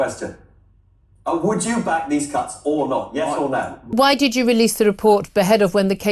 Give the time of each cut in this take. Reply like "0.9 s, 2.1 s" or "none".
3.9 s